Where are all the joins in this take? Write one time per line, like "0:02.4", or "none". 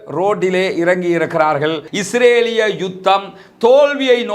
0:01.9